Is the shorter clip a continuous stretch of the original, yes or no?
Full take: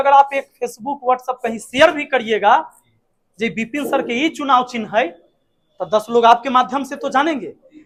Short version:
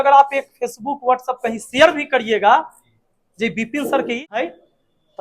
no